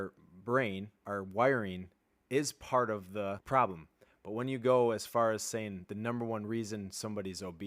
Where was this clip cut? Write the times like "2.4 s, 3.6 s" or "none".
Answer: 1.0 s, 3.4 s